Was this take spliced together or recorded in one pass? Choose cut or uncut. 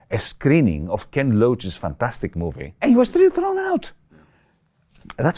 cut